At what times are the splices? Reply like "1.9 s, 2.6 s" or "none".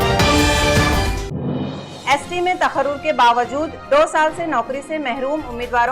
1.8 s